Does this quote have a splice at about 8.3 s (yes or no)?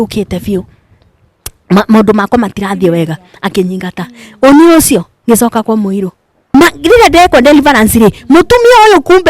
no